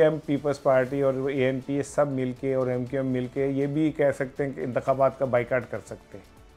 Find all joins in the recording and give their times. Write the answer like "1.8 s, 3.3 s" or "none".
none